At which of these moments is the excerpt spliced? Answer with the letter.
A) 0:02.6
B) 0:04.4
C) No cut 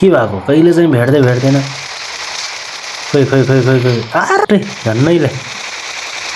B